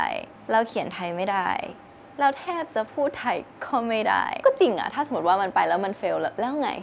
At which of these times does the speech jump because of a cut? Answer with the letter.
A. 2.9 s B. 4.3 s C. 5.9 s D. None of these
B